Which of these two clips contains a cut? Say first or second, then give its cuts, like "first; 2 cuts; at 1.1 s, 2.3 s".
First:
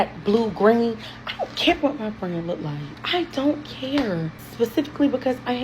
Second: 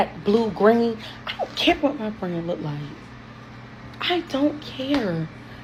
first; 2 cuts; at 2.9 s, 4.4 s